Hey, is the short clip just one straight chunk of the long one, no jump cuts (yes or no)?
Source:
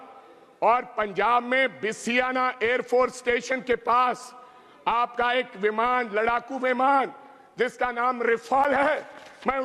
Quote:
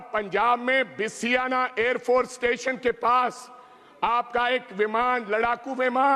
yes